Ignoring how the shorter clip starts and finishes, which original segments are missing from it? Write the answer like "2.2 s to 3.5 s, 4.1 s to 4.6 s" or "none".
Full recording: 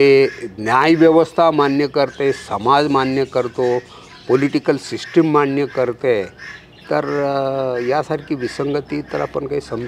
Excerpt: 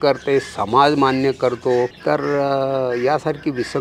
3.9 s to 6.8 s